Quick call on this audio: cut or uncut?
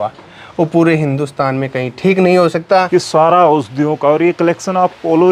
cut